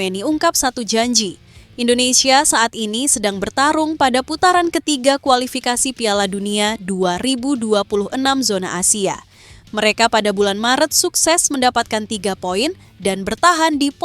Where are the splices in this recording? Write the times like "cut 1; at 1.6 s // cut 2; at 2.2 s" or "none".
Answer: none